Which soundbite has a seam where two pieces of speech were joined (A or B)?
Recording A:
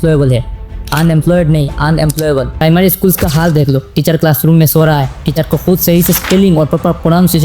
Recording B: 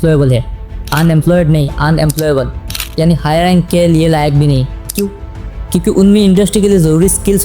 A